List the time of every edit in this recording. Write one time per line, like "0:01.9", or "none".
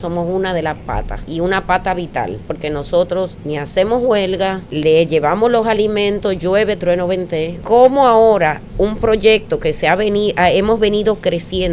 0:01.2
0:02.4
0:03.4
0:04.6
0:07.6